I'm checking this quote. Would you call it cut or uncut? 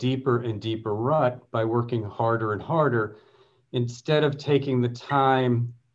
uncut